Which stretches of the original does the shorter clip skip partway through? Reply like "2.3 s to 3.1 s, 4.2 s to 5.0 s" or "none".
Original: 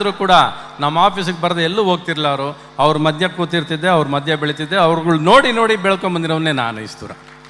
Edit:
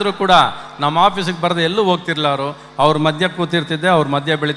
none